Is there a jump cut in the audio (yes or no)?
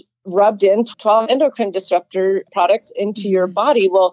yes